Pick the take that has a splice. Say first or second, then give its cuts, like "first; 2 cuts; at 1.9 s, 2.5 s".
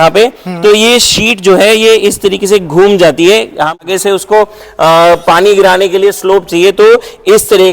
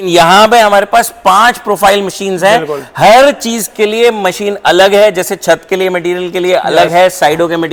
first; 1 cut; at 3.9 s